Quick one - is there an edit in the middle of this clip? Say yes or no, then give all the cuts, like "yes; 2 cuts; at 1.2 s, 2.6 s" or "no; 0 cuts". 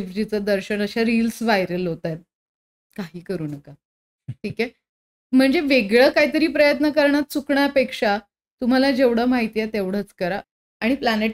yes; 1 cut; at 10.4 s